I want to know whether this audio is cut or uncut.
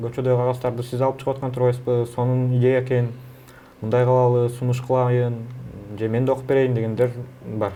uncut